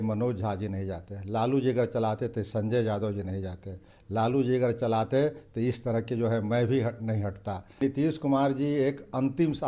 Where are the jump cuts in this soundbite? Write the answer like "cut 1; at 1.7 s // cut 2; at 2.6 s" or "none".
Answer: cut 1; at 7.8 s